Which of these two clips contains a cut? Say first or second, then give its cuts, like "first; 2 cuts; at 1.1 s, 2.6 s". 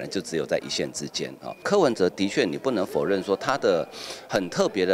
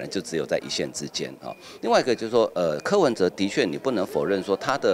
first; 1 cut; at 1.6 s